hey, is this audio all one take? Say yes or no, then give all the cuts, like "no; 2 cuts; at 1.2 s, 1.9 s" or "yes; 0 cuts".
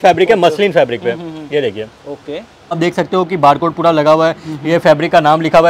no; 1 cut; at 2.8 s